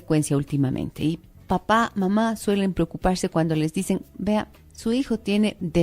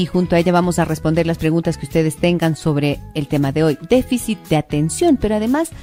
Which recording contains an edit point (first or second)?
first